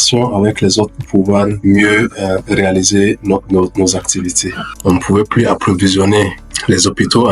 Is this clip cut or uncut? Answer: cut